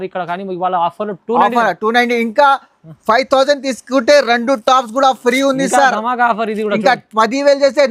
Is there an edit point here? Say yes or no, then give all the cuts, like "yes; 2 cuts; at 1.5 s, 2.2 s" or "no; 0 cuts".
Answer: no; 0 cuts